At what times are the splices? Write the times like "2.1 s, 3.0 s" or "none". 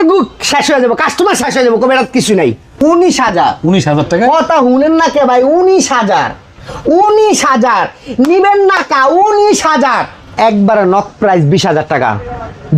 2.8 s, 10.3 s